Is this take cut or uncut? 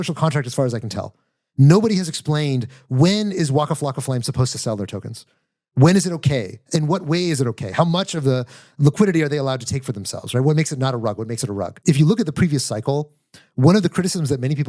cut